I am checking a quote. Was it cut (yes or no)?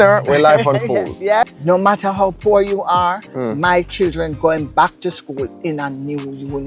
yes